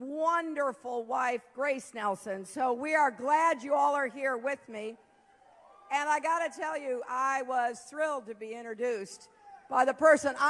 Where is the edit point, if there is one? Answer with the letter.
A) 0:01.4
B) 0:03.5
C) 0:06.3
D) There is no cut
B